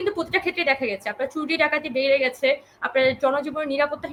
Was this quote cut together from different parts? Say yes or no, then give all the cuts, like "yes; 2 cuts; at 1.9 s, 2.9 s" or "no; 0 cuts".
no; 0 cuts